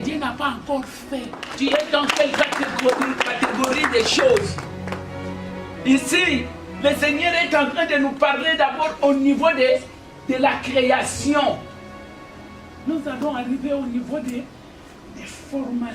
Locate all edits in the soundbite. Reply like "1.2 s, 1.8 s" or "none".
1.4 s